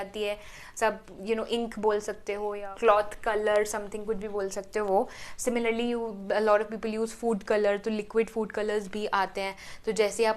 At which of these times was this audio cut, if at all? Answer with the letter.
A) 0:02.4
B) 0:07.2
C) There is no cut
A